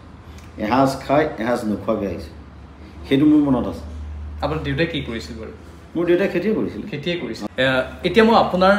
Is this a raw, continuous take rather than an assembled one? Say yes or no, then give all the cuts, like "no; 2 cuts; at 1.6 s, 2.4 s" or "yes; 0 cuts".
no; 1 cut; at 7.4 s